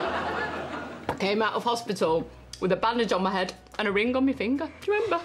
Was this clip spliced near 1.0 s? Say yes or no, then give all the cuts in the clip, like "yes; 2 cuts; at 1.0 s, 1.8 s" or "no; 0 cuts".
no; 0 cuts